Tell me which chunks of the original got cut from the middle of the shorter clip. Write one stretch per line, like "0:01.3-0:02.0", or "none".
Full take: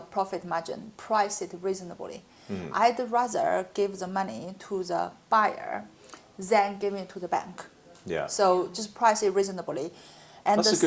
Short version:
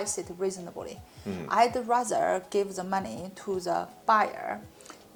none